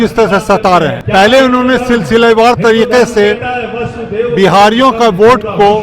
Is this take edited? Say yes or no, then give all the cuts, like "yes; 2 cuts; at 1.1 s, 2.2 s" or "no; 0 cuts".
yes; 1 cut; at 1.0 s